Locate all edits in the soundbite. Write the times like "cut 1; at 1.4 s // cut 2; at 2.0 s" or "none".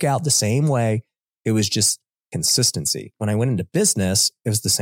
cut 1; at 3.1 s